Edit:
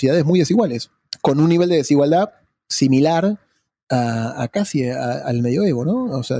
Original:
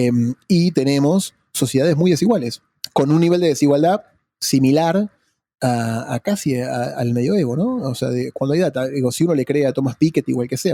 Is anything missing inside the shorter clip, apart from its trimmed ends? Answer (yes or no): no